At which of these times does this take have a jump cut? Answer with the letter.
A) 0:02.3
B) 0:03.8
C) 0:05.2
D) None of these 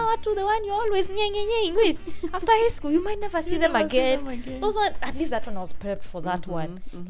D